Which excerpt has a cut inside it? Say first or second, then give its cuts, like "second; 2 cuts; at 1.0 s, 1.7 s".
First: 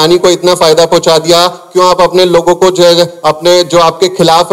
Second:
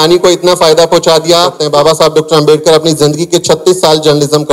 second; 1 cut; at 1.6 s